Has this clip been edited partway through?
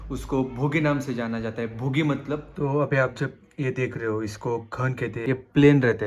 yes; 2 cuts; at 2.6 s, 5.3 s

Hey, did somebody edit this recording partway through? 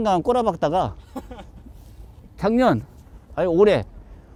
no; 0 cuts

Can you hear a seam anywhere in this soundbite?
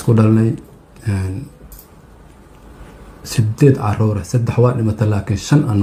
no; 0 cuts

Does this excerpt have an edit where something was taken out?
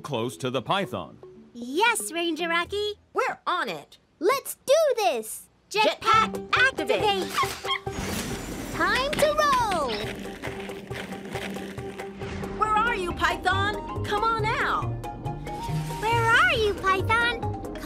no; 0 cuts

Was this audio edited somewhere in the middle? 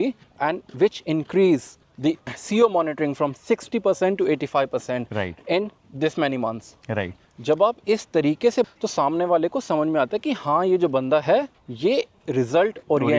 no; 0 cuts

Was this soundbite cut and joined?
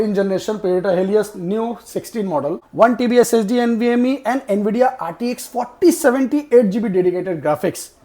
yes; 1 cut; at 2.6 s

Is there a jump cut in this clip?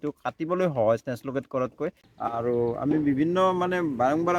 yes; 1 cut; at 2.0 s

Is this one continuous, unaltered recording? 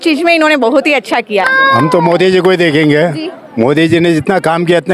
no; 1 cut; at 1.4 s

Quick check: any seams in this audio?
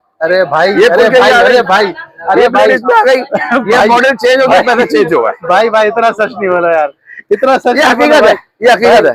no; 0 cuts

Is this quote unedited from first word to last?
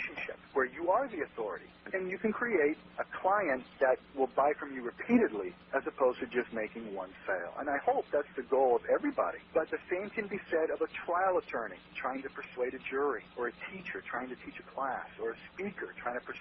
no; 1 cut; at 1.7 s

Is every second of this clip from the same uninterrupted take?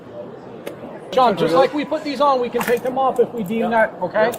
no; 1 cut; at 0.9 s

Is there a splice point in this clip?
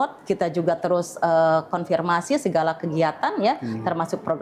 no; 0 cuts

